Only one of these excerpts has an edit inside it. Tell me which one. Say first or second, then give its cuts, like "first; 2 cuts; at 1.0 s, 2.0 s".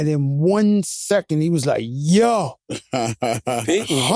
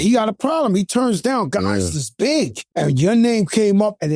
second; 1 cut; at 2.6 s